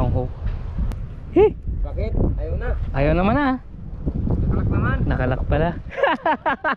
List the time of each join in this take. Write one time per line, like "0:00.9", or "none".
0:00.9